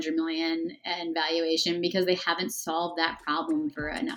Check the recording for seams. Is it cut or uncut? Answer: uncut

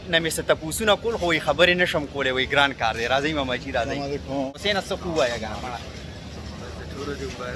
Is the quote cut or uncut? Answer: cut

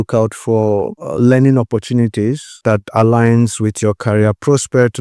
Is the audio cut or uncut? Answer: cut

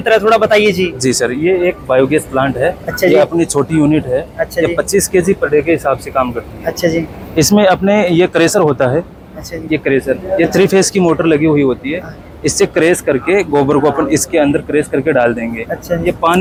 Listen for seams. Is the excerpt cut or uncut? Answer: uncut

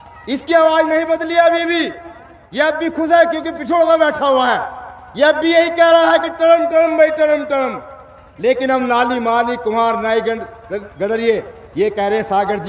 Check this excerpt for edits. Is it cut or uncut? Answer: uncut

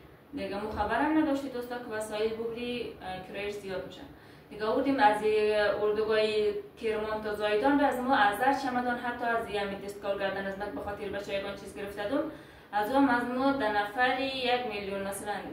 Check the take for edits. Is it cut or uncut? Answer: uncut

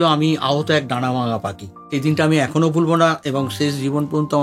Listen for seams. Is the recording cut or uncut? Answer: cut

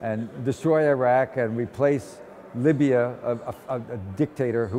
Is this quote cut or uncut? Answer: uncut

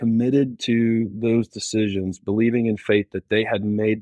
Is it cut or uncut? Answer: uncut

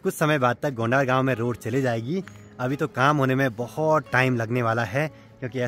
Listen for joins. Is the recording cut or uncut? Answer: uncut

